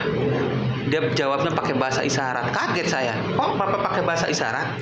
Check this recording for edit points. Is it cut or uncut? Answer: uncut